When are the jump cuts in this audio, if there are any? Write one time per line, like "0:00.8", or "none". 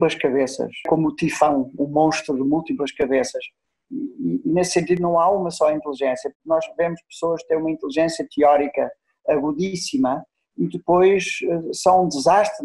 none